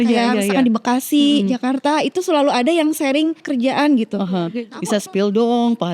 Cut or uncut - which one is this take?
cut